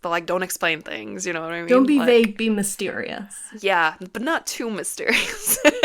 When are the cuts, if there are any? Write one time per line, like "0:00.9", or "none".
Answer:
0:03.4